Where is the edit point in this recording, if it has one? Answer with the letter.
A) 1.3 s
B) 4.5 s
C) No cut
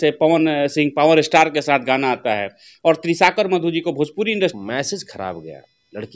B